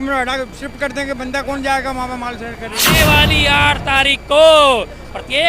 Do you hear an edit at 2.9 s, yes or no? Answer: yes